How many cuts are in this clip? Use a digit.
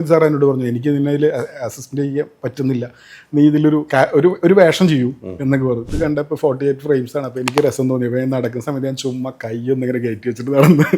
1